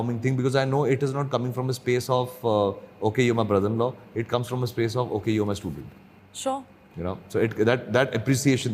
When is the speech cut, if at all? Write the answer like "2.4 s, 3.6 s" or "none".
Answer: none